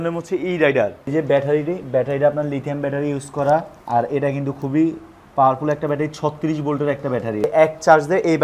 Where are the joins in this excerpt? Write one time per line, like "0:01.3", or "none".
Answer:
0:01.1
0:07.4

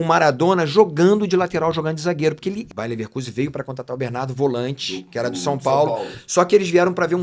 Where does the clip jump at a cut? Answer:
0:02.6

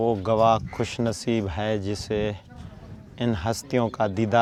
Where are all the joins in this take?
none

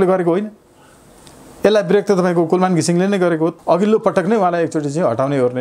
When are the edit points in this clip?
0:03.6

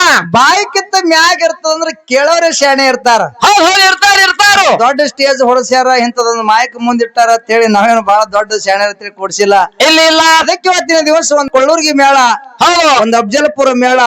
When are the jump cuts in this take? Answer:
0:11.5

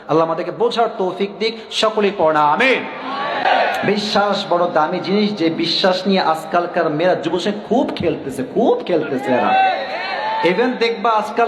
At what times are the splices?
0:03.4

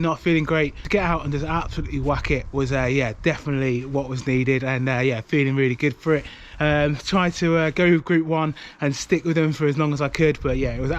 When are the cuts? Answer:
none

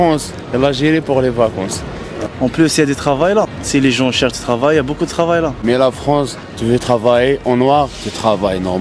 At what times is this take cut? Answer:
0:02.1
0:03.6
0:05.6

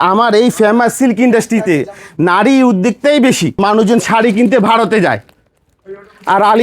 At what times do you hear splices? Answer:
0:03.6

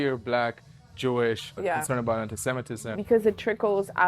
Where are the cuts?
0:01.6
0:03.0

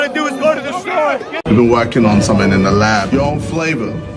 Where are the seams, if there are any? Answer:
0:01.3

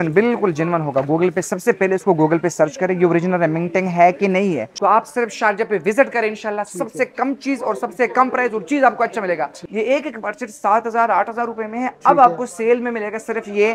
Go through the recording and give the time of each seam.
0:04.7
0:09.6

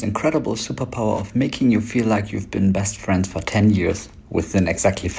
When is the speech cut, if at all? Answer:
none

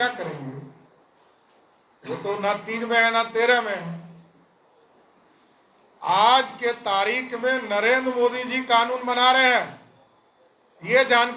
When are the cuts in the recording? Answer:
none

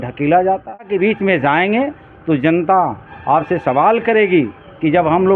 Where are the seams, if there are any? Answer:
0:00.9

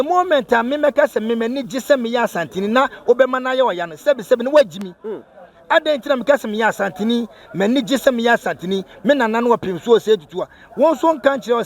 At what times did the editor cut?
none

